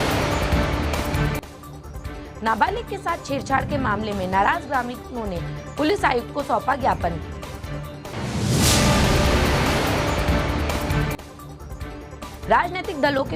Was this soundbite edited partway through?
no; 0 cuts

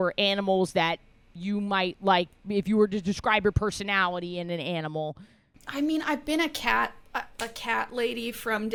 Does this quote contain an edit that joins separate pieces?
no; 0 cuts

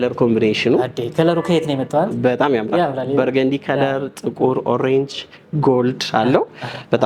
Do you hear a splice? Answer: no; 0 cuts

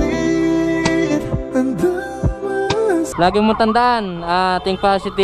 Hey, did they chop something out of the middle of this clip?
yes; 1 cut; at 3.1 s

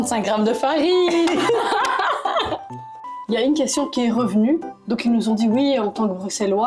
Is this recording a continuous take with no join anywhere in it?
no; 1 cut; at 3.1 s

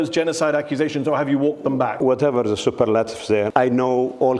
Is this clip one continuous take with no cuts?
no; 2 cuts; at 2.0 s, 3.5 s

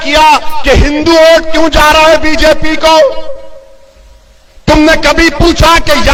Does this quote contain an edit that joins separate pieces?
no; 0 cuts

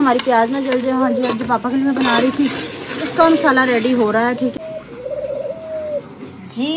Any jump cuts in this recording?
yes; 1 cut; at 4.5 s

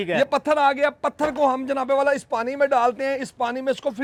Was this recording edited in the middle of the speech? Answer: no; 0 cuts

